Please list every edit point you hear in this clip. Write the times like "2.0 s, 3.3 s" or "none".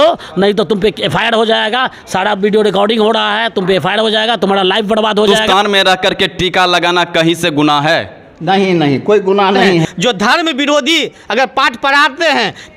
5.4 s, 9.8 s

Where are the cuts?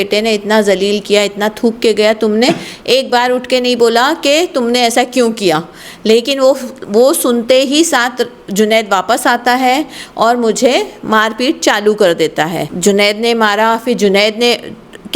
12.7 s

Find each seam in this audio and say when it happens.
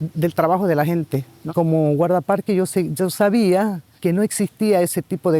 1.5 s, 3.9 s

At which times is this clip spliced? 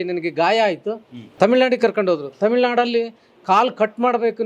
1.3 s

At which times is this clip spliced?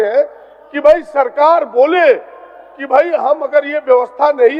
none

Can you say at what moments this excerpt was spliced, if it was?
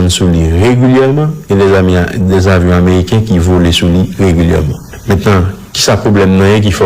4.5 s

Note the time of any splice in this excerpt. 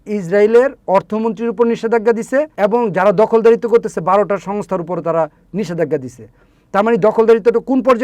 2.5 s

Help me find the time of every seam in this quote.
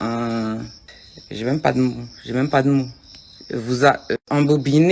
none

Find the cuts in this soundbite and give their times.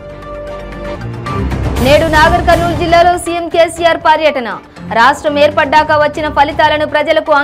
0.9 s

